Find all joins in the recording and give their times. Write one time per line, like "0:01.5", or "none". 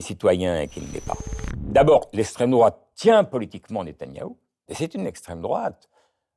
0:01.5
0:04.7